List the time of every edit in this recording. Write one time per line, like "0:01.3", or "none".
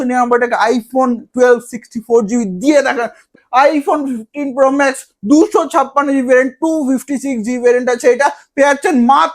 0:03.3

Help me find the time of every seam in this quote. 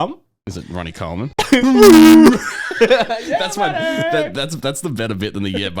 0:01.3

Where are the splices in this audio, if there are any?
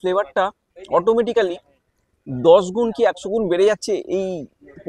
none

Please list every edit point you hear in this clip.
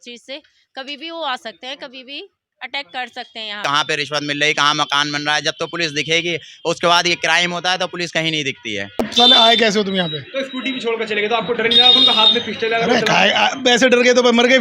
0:03.6
0:09.0

